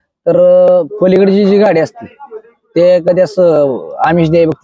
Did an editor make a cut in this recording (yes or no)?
no